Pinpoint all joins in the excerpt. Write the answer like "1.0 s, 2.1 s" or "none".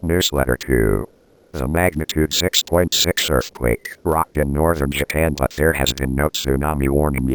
none